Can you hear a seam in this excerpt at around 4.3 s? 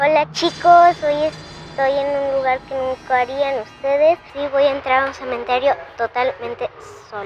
yes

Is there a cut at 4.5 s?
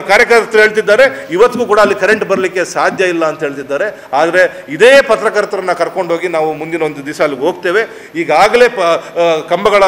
no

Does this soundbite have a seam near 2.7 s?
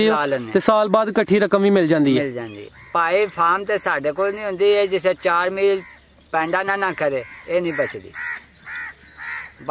yes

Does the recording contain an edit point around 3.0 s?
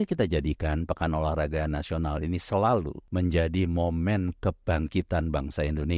yes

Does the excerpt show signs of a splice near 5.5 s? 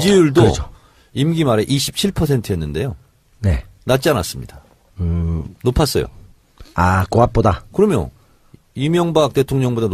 yes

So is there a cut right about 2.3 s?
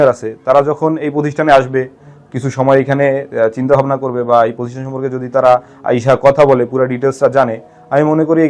no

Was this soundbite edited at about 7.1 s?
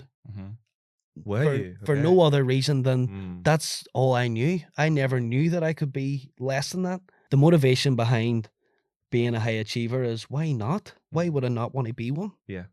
yes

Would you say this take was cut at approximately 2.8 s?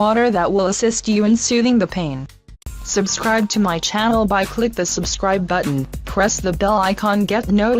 no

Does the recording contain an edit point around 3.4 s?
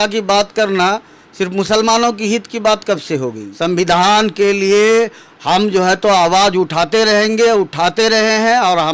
yes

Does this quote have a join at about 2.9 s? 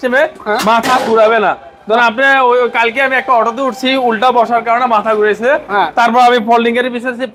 no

